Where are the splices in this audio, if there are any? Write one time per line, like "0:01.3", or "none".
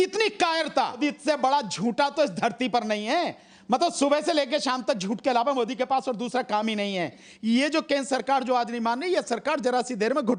0:01.0
0:07.3